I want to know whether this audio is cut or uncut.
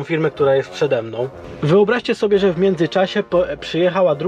cut